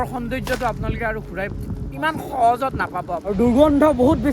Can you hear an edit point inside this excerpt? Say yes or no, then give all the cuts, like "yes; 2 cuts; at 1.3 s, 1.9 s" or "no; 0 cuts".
yes; 1 cut; at 3.2 s